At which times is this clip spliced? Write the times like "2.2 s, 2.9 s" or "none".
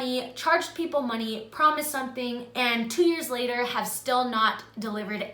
none